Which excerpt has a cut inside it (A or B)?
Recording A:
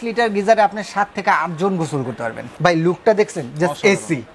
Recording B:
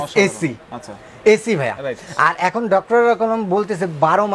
A